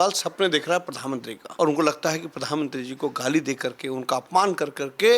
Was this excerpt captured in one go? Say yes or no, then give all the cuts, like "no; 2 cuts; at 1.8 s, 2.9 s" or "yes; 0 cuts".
no; 1 cut; at 1.4 s